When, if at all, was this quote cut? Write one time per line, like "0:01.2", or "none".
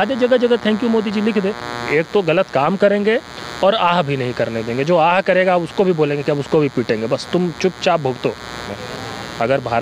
0:01.8
0:08.7